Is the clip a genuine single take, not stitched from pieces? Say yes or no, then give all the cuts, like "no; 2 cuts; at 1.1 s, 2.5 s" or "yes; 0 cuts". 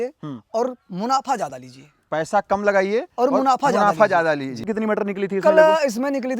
no; 1 cut; at 4.7 s